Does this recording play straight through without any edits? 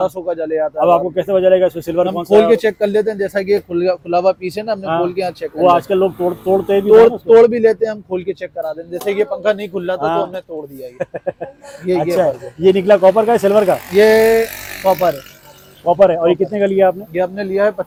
yes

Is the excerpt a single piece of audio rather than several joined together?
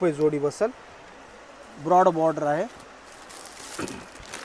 yes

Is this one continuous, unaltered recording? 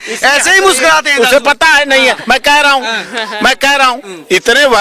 yes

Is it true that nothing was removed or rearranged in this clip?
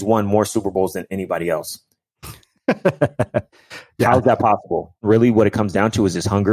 no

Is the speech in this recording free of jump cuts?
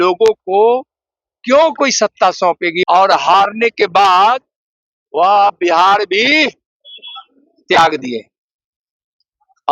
no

